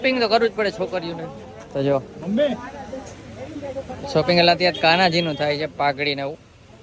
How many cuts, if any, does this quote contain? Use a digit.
0